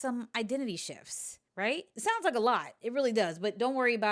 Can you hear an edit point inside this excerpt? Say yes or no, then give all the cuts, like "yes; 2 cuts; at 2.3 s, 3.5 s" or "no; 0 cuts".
yes; 1 cut; at 1.9 s